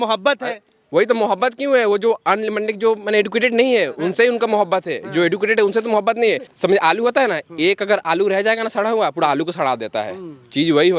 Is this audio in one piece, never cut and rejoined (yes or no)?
no